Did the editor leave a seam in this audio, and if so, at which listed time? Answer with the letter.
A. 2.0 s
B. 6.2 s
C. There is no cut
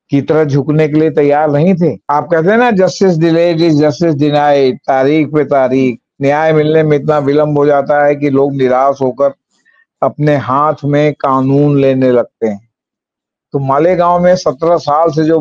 A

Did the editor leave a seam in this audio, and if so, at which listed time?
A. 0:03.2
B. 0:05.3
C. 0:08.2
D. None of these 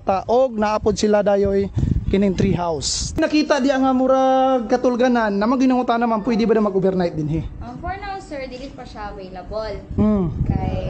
A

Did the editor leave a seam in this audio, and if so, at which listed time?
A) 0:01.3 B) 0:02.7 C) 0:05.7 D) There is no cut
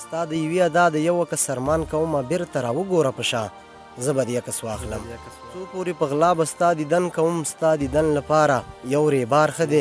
C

